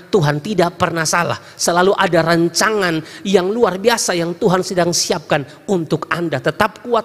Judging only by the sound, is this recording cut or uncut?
uncut